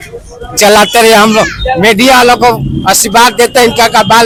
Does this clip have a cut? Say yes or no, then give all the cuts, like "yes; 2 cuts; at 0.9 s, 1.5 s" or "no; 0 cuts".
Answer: no; 0 cuts